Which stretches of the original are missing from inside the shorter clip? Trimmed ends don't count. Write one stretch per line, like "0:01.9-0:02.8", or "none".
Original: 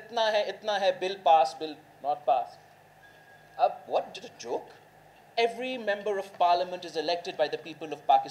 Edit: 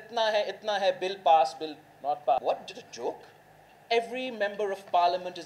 0:02.4-0:03.9